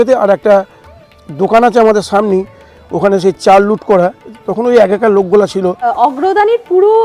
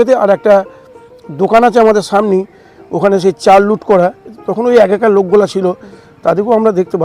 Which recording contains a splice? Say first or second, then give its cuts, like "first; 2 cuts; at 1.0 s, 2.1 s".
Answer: first; 1 cut; at 5.8 s